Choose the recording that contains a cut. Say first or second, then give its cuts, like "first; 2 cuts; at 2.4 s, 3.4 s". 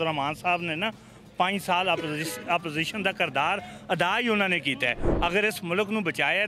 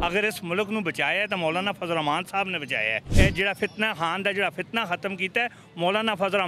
second; 1 cut; at 3.1 s